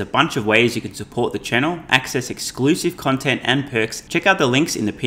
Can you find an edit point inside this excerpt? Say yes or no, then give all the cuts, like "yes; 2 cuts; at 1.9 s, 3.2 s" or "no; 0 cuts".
yes; 1 cut; at 4.0 s